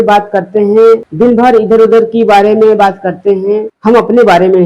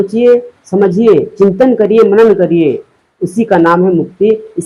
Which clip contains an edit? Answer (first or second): first